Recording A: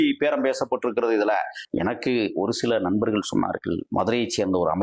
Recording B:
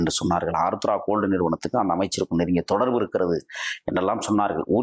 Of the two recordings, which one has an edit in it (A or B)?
A